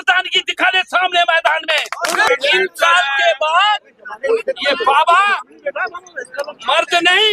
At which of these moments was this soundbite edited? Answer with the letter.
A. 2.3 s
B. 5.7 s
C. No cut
A